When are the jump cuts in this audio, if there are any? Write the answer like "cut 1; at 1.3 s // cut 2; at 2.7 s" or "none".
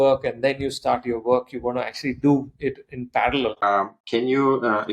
cut 1; at 3.6 s